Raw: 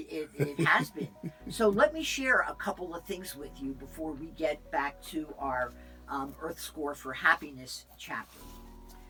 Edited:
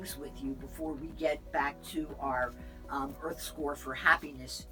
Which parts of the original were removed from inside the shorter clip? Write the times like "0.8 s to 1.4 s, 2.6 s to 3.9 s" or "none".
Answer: none